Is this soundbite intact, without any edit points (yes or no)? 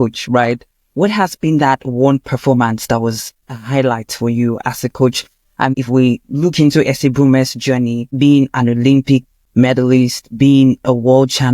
no